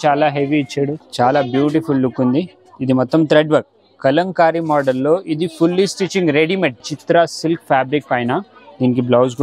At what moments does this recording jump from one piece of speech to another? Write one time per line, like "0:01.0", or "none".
0:01.0
0:06.9